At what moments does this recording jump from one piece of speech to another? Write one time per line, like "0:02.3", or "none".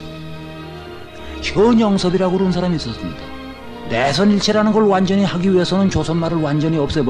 0:03.3